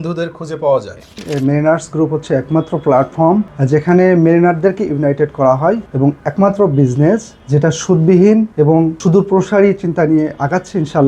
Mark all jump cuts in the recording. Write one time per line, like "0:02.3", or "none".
0:01.2
0:03.6
0:05.9
0:07.3
0:08.7

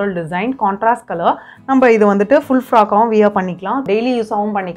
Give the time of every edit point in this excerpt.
0:03.8

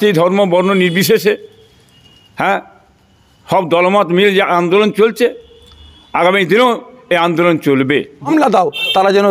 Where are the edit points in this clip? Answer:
0:08.3

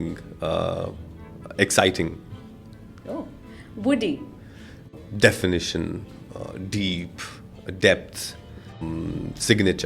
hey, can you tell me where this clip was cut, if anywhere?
0:04.9
0:08.8

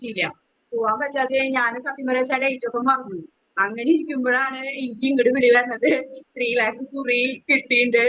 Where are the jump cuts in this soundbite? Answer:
none

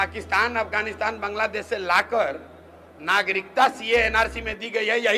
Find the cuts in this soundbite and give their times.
none

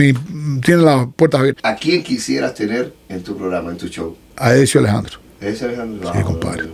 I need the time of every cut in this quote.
0:01.6
0:04.3

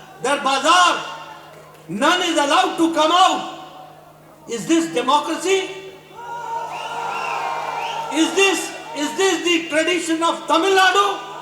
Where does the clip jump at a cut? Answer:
none

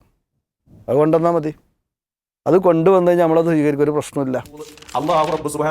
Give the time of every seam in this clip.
0:04.8

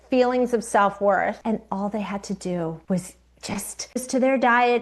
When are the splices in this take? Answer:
0:01.4
0:02.8
0:03.8

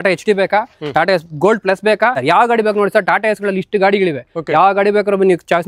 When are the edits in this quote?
0:02.2

